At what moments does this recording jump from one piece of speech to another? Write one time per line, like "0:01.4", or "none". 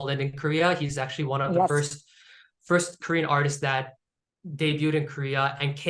none